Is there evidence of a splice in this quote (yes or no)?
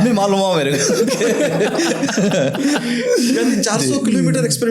no